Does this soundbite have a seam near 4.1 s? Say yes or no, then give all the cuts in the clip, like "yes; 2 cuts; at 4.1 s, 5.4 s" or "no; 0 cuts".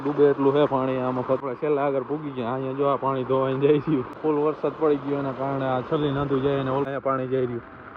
yes; 3 cuts; at 1.4 s, 4.1 s, 6.9 s